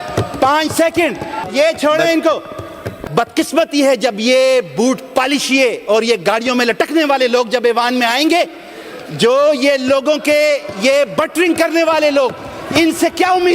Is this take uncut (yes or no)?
no